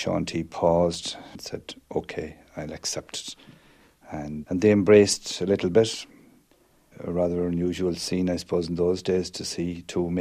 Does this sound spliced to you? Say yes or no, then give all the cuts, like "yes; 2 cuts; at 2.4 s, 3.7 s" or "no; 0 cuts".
yes; 2 cuts; at 1.4 s, 4.4 s